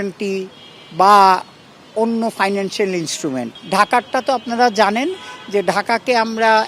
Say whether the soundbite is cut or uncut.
cut